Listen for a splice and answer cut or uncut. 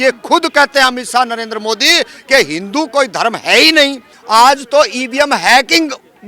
cut